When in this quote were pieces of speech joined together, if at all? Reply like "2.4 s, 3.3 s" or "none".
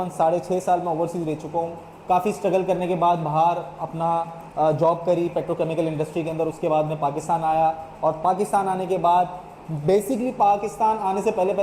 none